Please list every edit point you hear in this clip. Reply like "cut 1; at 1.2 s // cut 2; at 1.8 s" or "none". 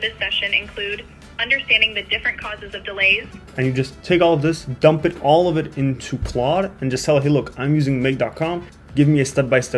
cut 1; at 3.4 s // cut 2; at 8.7 s